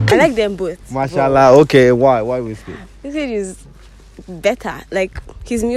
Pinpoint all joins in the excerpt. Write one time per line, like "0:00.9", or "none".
none